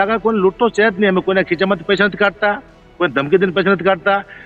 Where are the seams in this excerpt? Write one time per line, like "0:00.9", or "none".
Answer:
none